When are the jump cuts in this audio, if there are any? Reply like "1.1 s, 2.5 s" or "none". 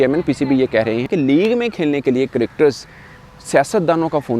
1.1 s